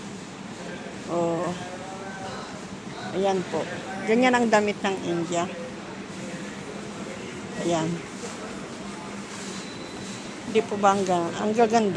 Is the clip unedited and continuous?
no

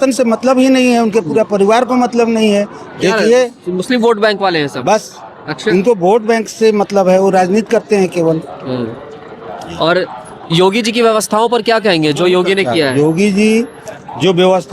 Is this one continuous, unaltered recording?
yes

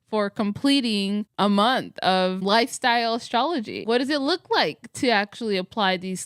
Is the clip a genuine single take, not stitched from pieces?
no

